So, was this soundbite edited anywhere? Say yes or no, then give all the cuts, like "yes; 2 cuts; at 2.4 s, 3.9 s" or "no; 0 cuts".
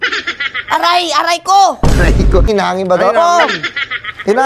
yes; 1 cut; at 2.5 s